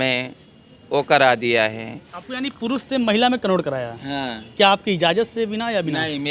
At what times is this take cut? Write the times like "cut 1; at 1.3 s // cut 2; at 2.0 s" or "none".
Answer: none